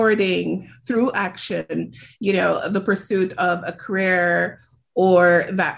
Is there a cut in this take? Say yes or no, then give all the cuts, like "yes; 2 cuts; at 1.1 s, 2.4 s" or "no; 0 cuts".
no; 0 cuts